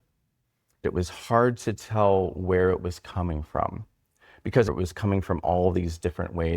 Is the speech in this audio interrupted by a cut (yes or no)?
yes